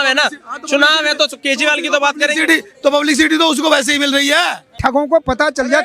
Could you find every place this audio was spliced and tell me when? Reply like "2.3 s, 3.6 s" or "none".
4.8 s